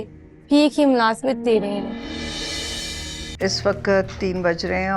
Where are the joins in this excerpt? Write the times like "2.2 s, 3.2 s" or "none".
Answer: 3.3 s